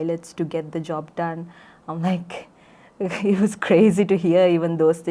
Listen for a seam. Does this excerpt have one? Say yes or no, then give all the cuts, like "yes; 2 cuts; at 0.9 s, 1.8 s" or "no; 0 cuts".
no; 0 cuts